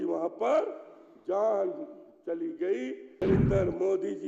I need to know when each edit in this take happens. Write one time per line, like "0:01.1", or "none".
0:03.2